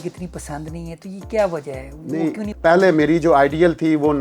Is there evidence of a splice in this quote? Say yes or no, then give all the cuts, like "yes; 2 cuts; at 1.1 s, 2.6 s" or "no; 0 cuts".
yes; 1 cut; at 2.5 s